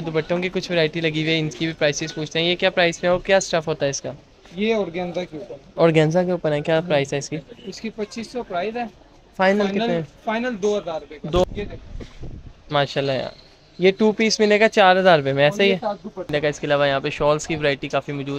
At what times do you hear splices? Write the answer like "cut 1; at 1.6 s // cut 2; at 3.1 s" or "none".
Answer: cut 1; at 11.4 s // cut 2; at 16.3 s